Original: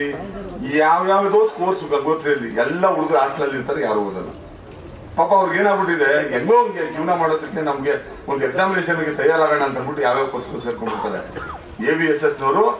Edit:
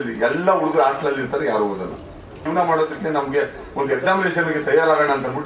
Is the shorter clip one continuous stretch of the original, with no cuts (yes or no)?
no